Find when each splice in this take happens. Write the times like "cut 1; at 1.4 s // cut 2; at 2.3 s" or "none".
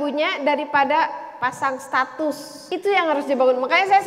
cut 1; at 2.5 s